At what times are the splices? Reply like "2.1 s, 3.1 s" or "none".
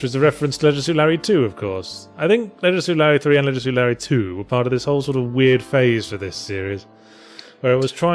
none